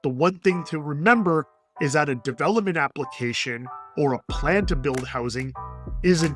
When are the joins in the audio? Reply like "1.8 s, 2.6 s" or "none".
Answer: none